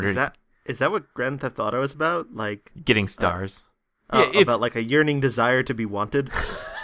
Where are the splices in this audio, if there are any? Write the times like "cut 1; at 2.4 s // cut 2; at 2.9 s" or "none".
none